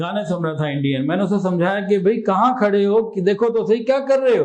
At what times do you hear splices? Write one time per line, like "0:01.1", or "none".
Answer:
none

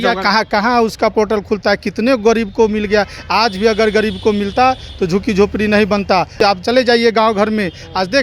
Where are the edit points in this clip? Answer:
0:06.3

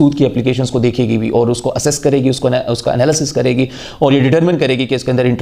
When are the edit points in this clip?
none

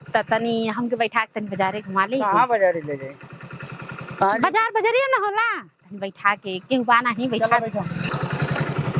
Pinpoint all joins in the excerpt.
0:08.0

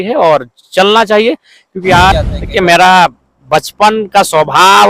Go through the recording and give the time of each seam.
0:02.1

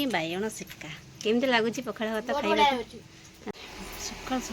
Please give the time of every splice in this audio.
0:03.5

